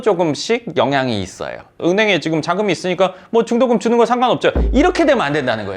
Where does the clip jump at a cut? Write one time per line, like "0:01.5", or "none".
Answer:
none